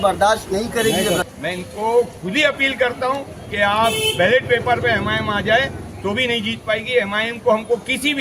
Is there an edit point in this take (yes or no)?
yes